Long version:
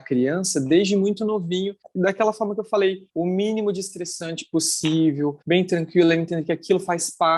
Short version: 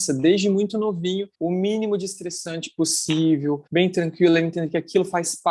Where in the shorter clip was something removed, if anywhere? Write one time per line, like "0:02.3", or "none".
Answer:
0:01.3